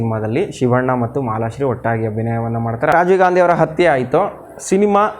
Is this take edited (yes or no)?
yes